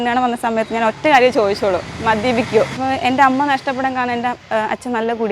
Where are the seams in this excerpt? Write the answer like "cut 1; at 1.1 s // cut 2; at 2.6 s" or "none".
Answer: cut 1; at 2.8 s // cut 2; at 4.4 s